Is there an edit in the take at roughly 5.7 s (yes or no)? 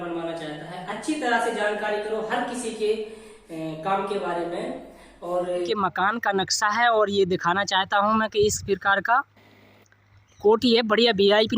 yes